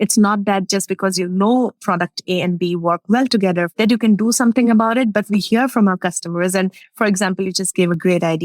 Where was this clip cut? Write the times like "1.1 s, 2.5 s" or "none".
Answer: 1.8 s, 3.7 s